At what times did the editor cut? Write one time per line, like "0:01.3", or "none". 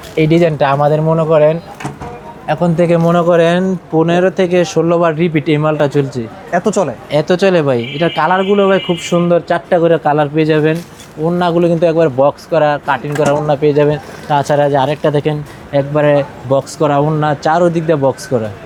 none